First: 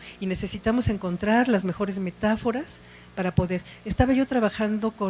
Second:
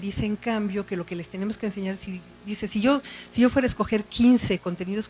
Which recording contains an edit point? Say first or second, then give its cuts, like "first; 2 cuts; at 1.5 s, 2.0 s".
first; 1 cut; at 3.8 s